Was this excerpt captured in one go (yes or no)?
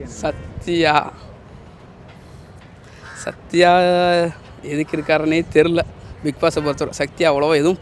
yes